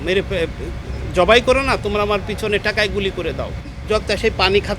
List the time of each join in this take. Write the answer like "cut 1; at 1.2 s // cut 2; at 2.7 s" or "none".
cut 1; at 3.8 s